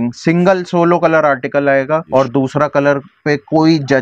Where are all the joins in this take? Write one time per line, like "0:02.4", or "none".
0:02.1